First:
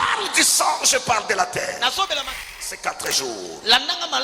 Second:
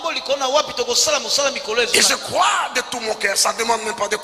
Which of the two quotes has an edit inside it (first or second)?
first